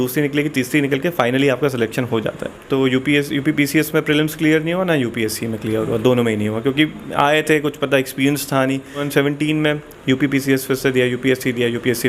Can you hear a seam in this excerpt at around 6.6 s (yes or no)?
no